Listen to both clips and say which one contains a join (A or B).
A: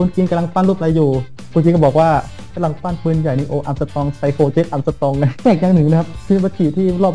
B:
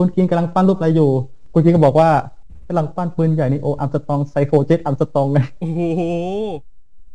A